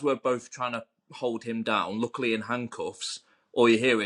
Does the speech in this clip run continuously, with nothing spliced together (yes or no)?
yes